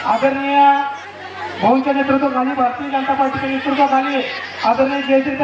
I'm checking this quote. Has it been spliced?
no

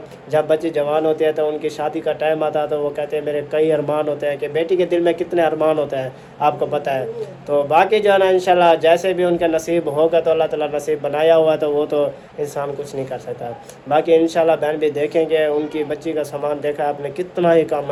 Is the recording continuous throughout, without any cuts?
yes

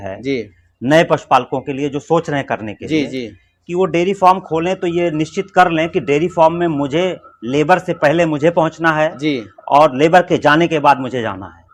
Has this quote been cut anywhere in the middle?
no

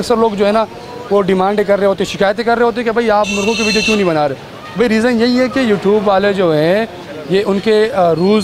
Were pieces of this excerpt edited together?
no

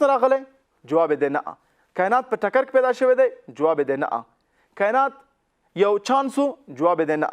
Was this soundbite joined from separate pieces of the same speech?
no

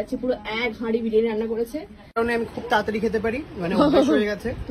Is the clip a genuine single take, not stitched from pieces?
no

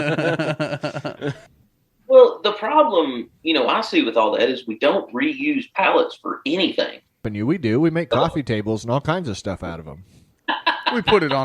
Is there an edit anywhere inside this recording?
yes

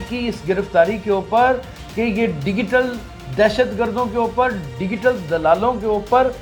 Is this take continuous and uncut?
yes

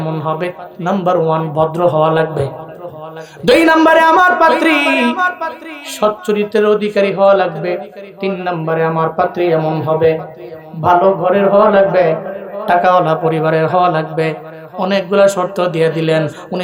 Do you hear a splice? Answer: no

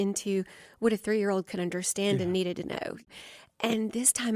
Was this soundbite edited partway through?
yes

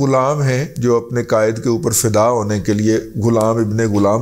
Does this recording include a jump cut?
no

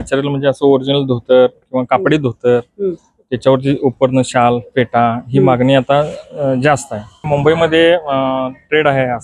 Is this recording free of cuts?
no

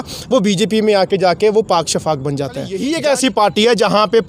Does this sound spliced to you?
yes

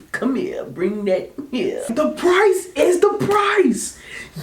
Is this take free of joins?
no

